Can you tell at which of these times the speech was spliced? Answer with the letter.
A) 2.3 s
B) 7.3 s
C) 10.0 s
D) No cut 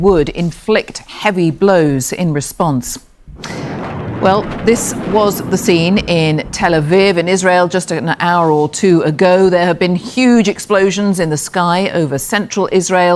B